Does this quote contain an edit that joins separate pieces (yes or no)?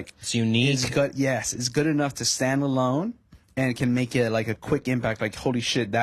no